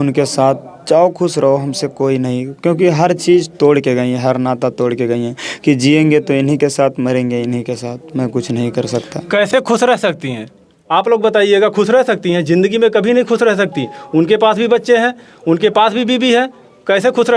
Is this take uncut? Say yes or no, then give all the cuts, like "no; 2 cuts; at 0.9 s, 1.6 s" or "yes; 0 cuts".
yes; 0 cuts